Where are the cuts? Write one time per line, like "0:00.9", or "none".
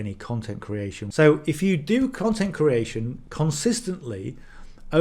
0:01.0